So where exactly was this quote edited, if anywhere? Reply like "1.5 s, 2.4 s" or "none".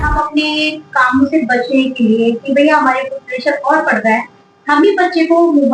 none